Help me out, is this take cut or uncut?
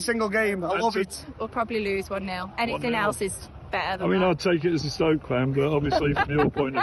cut